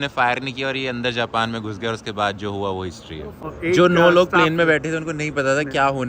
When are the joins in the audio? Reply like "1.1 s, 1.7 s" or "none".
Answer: 3.4 s